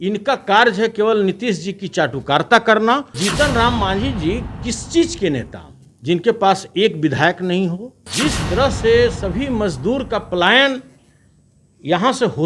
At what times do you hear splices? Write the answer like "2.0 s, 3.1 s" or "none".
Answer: 3.2 s, 8.1 s